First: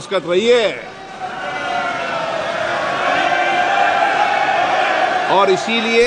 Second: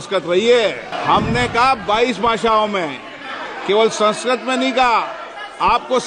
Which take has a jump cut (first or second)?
second